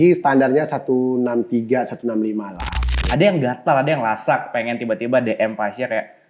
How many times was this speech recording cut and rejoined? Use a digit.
1